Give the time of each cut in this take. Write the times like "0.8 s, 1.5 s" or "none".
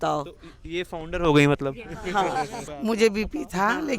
2.6 s